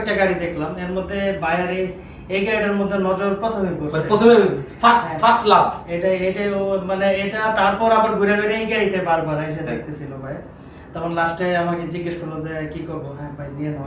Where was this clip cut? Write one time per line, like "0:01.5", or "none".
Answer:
none